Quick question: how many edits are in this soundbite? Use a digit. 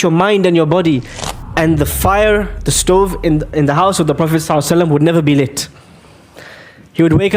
1